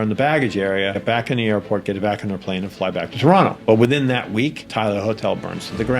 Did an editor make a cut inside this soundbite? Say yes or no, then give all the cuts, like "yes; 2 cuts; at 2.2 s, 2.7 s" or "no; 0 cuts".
yes; 3 cuts; at 1.0 s, 3.6 s, 4.6 s